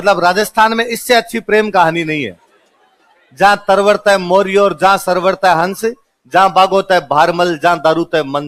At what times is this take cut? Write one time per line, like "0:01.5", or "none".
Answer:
none